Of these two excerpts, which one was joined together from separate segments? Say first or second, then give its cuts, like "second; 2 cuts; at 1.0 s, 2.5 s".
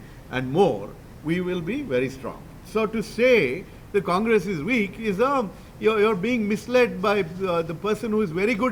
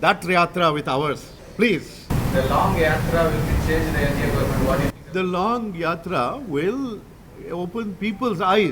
second; 1 cut; at 2.1 s